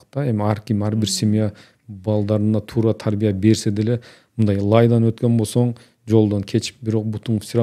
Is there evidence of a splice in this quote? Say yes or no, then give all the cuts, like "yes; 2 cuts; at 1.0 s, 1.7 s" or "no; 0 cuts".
no; 0 cuts